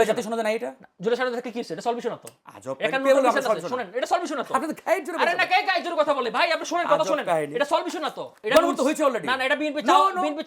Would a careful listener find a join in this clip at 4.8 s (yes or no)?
no